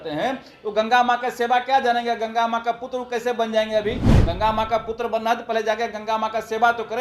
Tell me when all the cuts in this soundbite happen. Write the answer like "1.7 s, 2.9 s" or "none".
none